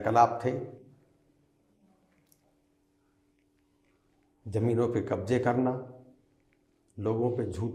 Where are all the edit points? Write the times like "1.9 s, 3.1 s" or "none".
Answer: none

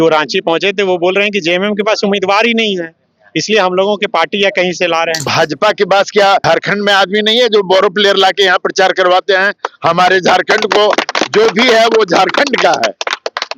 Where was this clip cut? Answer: 5.3 s, 6.4 s

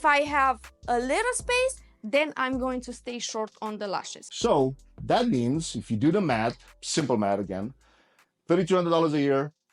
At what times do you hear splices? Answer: 4.2 s

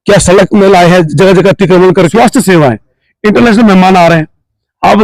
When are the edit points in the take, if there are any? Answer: 2.1 s

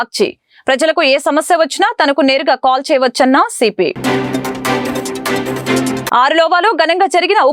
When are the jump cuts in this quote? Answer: none

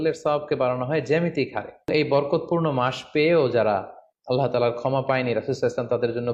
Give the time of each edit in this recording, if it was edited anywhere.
1.9 s

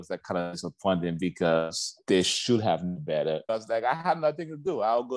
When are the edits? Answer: 1.9 s, 3.4 s

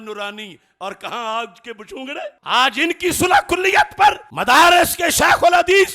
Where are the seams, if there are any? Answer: 2.4 s

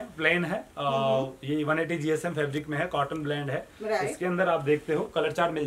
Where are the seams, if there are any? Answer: none

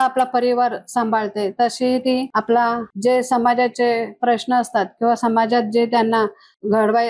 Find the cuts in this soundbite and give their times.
2.3 s, 2.9 s

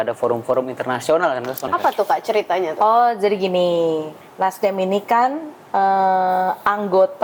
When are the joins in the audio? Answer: 1.6 s

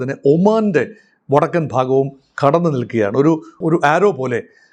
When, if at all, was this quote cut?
none

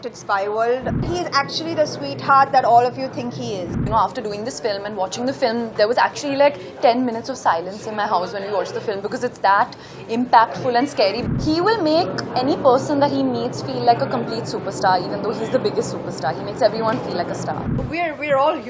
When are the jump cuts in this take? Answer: 1.0 s, 3.8 s, 11.2 s, 17.7 s

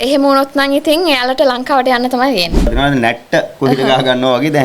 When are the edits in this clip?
2.7 s

